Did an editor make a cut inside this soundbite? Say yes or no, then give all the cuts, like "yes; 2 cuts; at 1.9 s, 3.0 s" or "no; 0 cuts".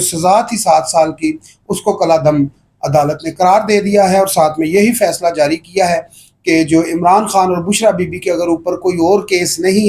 no; 0 cuts